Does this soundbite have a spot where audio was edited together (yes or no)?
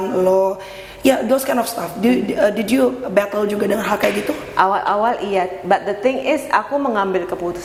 no